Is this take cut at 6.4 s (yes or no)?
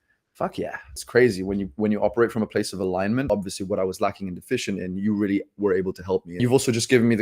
yes